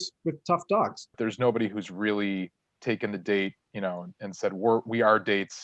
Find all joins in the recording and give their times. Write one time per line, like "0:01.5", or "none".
0:01.2